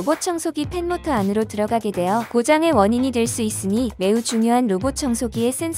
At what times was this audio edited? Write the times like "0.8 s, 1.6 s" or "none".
2.3 s, 3.9 s